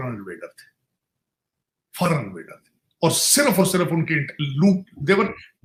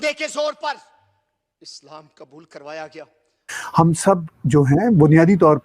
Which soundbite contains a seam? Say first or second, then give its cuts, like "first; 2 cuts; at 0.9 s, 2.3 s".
second; 1 cut; at 3.6 s